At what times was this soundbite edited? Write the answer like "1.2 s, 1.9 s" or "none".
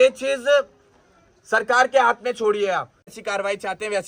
3.1 s